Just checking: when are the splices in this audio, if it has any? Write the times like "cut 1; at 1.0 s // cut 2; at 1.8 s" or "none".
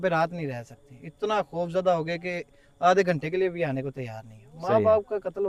none

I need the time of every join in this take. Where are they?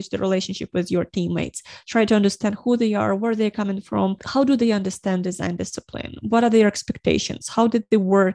none

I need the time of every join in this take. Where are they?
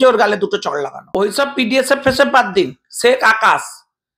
cut 1; at 1.1 s

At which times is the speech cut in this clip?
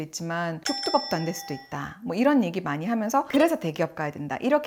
none

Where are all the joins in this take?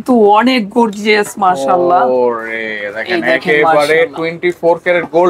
none

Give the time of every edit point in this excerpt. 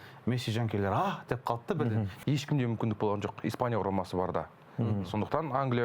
cut 1; at 2.1 s

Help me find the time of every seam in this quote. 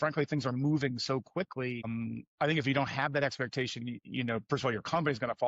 cut 1; at 1.9 s // cut 2; at 4.0 s

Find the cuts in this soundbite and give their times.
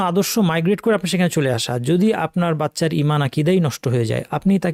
none

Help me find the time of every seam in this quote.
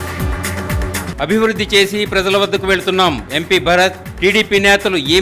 cut 1; at 1.1 s

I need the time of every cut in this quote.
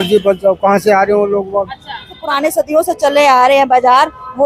cut 1; at 2.2 s

